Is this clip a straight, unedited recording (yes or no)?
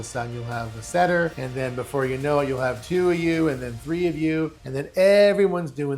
no